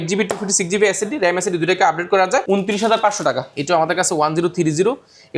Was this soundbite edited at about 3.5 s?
yes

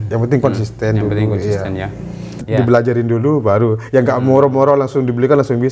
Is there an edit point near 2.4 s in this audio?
yes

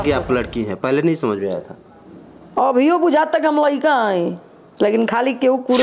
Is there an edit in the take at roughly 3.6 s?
no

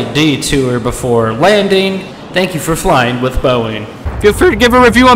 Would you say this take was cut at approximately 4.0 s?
yes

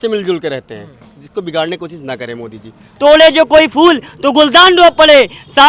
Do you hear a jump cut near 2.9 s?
yes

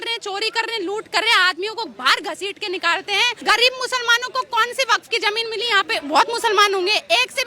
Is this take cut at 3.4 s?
yes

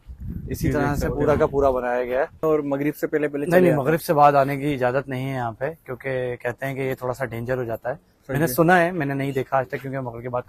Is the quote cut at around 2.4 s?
yes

